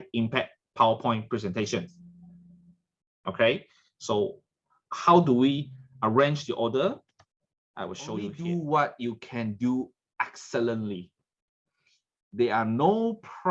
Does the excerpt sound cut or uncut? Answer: cut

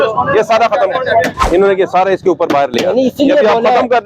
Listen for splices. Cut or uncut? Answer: cut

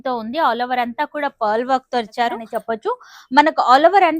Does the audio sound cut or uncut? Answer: cut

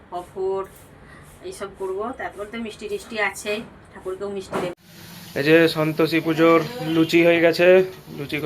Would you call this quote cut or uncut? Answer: cut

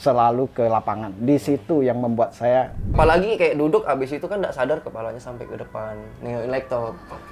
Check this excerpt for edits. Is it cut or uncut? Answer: cut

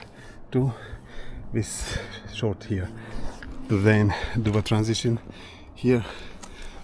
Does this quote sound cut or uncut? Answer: uncut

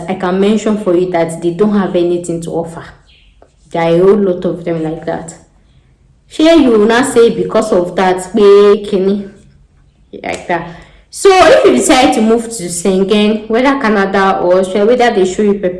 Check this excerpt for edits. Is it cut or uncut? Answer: uncut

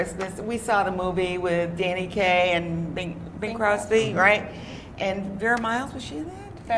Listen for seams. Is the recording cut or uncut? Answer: cut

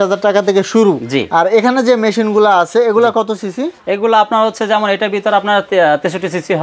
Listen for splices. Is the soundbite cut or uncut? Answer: uncut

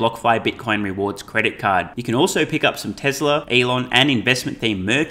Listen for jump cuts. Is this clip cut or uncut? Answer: cut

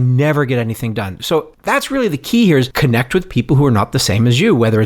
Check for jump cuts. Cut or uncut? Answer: cut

